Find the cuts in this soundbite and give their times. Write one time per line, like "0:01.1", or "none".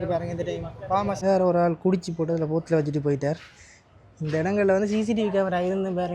0:01.2